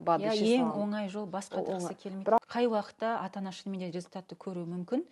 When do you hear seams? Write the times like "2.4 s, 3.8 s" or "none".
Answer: 2.4 s